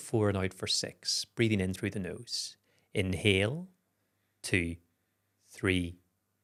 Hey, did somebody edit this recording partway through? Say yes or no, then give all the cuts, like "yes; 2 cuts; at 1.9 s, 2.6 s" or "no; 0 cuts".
no; 0 cuts